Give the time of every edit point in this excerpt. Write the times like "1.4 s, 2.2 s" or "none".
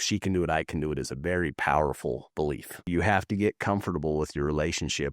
2.7 s